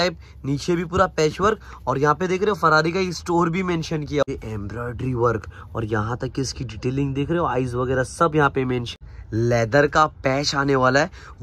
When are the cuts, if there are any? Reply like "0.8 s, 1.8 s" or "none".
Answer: 4.2 s, 9.0 s